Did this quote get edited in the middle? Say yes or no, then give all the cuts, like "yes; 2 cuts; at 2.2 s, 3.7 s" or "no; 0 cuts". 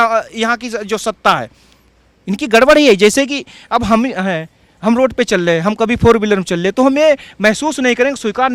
no; 0 cuts